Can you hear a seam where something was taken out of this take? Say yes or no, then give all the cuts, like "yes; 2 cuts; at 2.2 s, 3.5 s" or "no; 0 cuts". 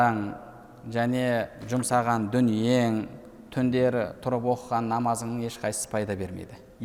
no; 0 cuts